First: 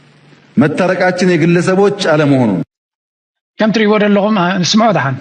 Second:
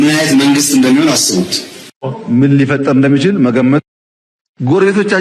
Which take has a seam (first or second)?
second